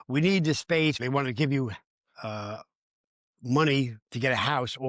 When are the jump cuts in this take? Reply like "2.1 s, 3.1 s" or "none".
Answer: 1.0 s